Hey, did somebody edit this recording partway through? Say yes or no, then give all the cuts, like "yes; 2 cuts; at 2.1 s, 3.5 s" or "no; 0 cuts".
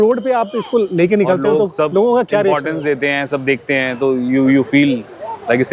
no; 0 cuts